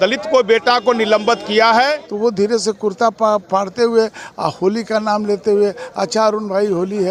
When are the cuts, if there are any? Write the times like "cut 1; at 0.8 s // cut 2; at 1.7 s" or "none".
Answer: cut 1; at 2.0 s